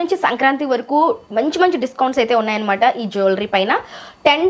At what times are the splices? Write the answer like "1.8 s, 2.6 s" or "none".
none